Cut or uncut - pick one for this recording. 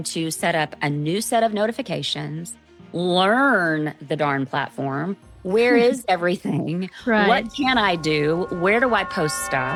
uncut